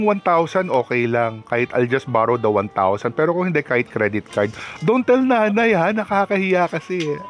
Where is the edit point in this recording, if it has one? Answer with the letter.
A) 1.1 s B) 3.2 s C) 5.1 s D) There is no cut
D